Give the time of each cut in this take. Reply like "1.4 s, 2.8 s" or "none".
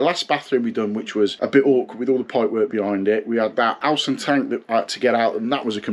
1.4 s, 3.8 s